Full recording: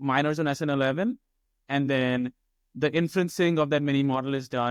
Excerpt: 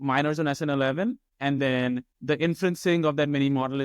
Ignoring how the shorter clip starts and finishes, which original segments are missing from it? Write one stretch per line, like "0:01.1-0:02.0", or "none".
0:01.3-0:01.6
0:02.4-0:02.7